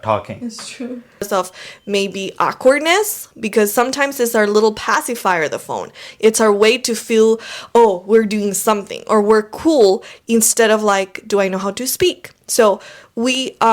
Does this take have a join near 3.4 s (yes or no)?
no